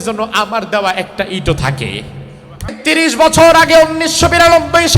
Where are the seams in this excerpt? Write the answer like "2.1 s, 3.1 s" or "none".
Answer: 2.8 s